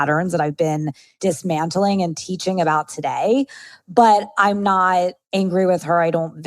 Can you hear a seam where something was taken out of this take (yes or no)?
yes